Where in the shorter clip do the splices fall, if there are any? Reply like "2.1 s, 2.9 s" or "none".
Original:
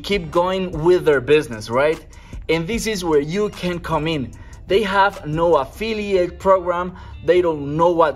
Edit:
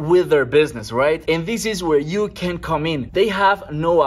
0.9 s, 3.0 s

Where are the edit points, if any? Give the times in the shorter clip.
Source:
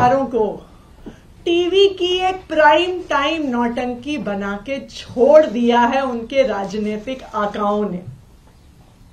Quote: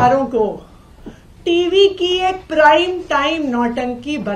none

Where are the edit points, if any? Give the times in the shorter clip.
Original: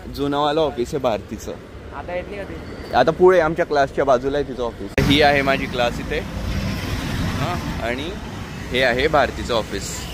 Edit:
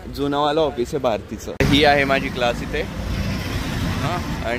1.5 s

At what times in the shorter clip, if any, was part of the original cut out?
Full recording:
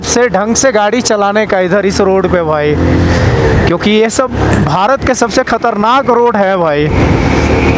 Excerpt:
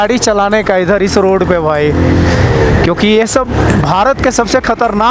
none

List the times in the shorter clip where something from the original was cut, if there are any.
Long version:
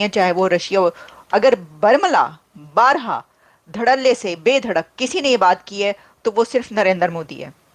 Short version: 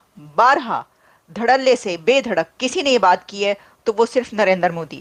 none

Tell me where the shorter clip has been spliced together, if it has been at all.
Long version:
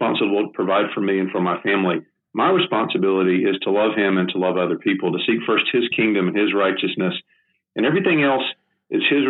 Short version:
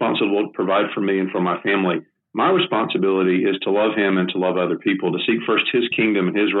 none

